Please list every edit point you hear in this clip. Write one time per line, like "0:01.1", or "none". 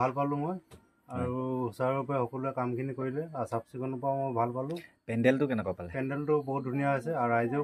none